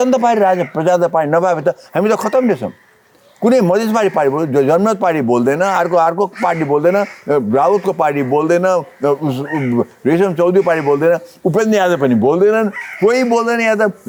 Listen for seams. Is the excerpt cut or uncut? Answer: uncut